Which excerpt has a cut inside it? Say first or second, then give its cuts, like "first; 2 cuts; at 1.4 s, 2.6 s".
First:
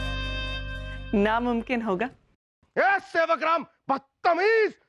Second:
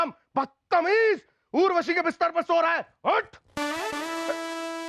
first; 1 cut; at 2.4 s